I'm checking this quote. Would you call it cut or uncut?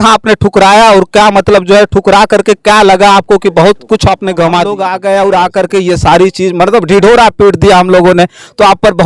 cut